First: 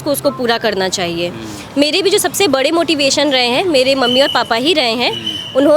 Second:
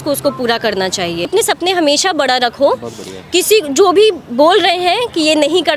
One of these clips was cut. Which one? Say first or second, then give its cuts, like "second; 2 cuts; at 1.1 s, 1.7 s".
second; 1 cut; at 1.3 s